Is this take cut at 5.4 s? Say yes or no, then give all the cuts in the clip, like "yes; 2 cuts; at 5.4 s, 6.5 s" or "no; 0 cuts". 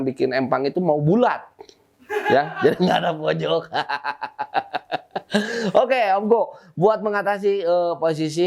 no; 0 cuts